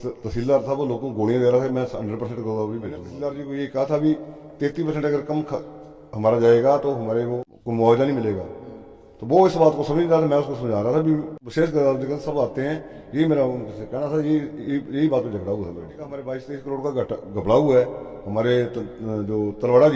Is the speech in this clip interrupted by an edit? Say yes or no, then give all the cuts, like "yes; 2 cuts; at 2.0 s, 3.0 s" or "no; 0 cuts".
yes; 4 cuts; at 3.1 s, 7.4 s, 11.4 s, 16.3 s